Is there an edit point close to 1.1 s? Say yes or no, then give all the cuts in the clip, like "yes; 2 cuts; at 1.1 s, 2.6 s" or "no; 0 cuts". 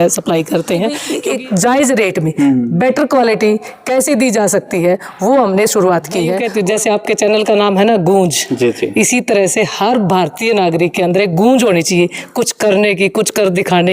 yes; 2 cuts; at 1.1 s, 6.4 s